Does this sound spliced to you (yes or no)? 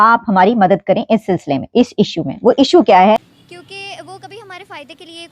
yes